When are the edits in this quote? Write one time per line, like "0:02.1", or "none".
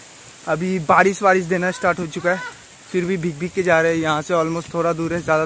none